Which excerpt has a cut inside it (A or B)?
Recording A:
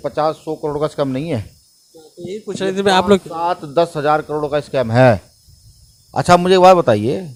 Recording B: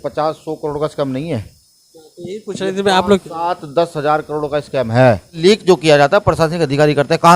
B